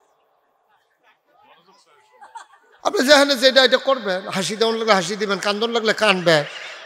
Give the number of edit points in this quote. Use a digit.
0